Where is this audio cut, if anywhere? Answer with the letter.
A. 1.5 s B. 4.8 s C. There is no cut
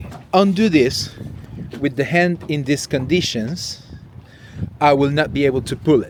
C